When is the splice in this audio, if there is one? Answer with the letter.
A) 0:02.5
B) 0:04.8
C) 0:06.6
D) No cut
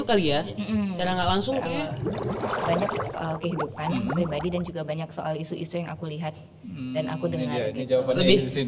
A